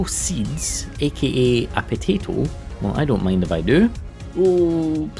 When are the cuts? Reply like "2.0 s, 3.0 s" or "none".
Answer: 4.1 s